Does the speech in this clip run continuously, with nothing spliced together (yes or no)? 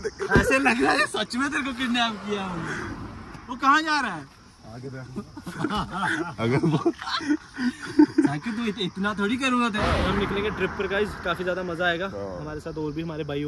no